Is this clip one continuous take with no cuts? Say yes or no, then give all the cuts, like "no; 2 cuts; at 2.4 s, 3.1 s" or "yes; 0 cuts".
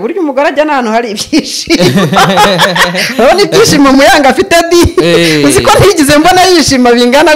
yes; 0 cuts